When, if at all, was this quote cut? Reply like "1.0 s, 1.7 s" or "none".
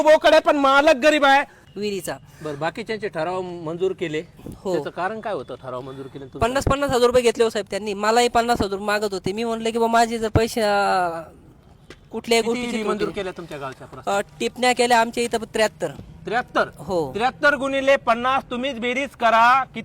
1.6 s